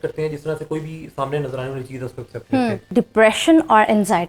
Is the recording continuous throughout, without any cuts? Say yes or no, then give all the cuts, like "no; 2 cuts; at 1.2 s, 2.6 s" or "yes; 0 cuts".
no; 1 cut; at 2.9 s